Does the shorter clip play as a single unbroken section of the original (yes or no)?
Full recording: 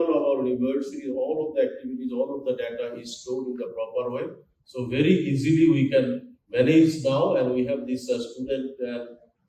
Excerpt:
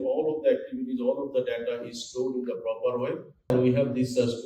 no